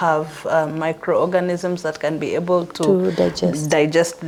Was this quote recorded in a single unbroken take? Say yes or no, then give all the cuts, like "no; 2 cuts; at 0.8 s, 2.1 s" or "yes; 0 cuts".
yes; 0 cuts